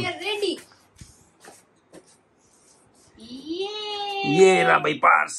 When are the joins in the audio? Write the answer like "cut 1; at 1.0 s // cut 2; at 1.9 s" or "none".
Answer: none